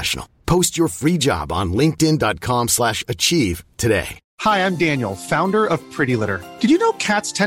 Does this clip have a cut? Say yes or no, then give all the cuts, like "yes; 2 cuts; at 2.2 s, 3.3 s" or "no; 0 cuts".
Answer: yes; 1 cut; at 4.2 s